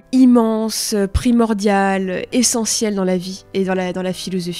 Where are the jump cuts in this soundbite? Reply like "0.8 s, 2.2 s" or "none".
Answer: none